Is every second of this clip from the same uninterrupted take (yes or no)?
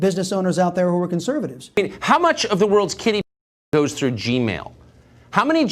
no